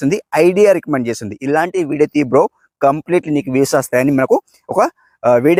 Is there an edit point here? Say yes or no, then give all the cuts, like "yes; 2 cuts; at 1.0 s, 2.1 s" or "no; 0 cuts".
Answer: no; 0 cuts